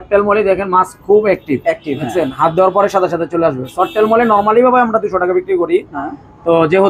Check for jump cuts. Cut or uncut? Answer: uncut